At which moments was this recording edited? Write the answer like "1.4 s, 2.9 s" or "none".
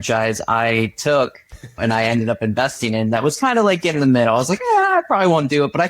1.8 s